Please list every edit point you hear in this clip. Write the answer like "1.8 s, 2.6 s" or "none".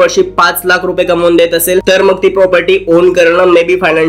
1.8 s

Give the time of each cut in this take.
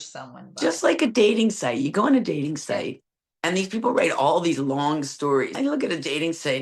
5.5 s

